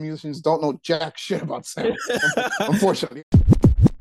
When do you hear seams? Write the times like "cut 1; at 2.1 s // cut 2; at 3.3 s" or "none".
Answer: cut 1; at 3.1 s